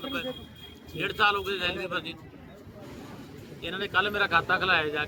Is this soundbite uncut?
yes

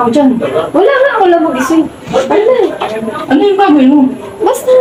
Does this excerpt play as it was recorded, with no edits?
yes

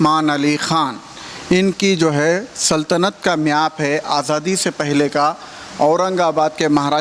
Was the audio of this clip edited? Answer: no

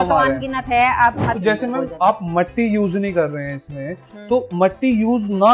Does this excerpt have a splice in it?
yes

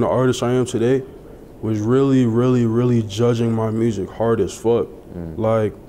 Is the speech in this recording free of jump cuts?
yes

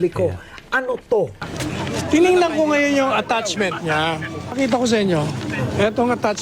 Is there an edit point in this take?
yes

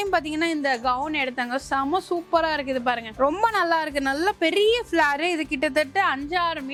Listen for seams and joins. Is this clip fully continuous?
yes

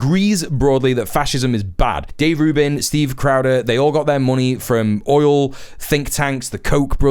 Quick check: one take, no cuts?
no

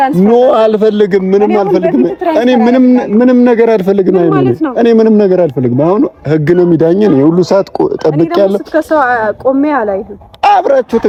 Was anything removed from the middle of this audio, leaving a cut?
no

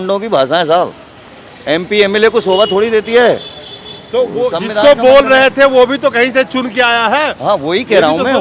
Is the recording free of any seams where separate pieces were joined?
yes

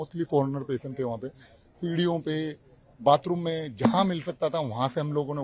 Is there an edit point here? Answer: no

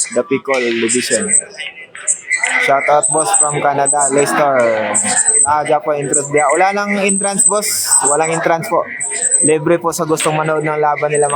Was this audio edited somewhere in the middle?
no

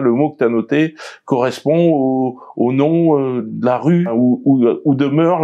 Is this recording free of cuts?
no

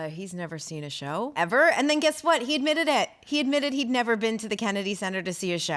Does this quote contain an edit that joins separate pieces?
yes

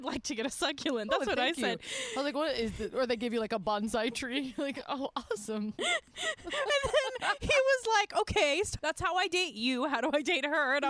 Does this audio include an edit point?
yes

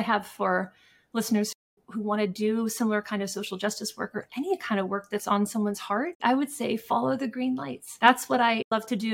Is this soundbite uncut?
yes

